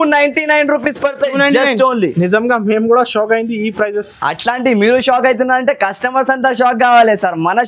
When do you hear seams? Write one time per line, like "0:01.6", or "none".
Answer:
none